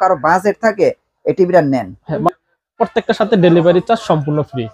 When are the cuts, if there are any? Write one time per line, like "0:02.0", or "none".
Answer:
0:02.3